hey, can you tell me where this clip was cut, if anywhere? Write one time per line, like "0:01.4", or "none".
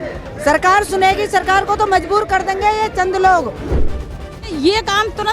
0:03.9

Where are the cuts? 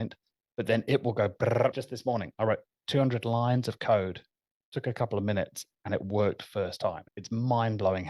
0:01.9
0:07.1

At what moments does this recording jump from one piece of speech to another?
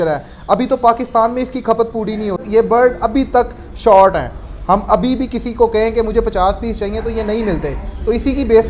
0:02.4

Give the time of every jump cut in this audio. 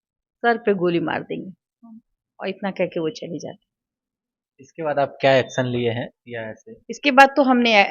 none

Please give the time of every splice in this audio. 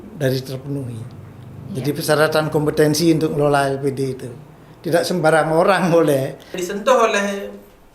0:06.6

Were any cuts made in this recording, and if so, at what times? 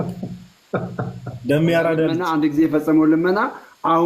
0:02.2

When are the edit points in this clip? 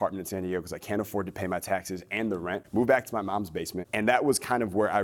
0:02.6
0:03.8

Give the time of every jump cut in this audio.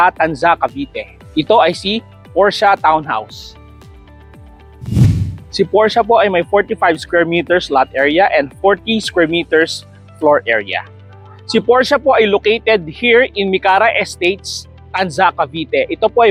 none

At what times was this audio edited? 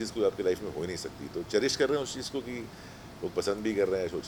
none

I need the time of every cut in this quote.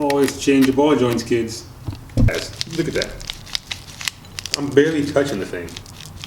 0:02.5

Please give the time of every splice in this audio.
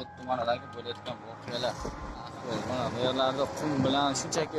0:02.3

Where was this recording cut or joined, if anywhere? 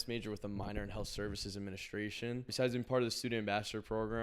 0:02.5

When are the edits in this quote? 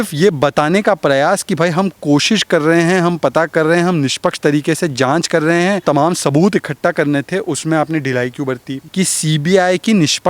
0:05.8
0:08.8

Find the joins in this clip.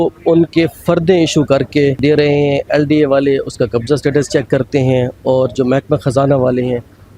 0:02.0

